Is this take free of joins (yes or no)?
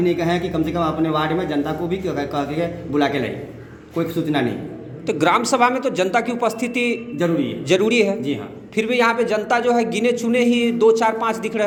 yes